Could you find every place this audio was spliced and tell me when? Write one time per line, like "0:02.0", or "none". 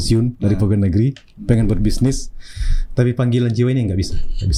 none